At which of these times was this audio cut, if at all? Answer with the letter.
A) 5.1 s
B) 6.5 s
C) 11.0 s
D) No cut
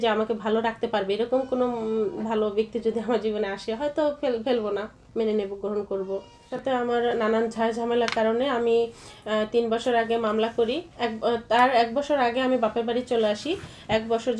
B